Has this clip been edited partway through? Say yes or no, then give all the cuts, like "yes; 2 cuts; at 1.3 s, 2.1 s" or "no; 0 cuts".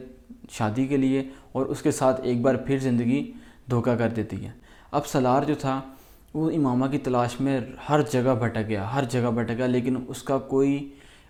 no; 0 cuts